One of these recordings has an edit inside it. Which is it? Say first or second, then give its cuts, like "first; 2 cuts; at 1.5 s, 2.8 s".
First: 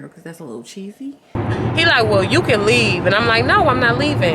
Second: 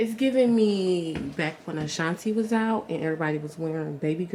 first; 1 cut; at 1.4 s